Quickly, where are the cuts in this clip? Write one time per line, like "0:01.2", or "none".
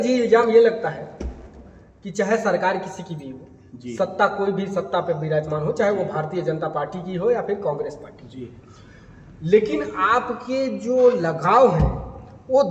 none